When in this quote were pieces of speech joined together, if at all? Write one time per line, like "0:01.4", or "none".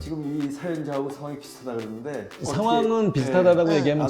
0:02.3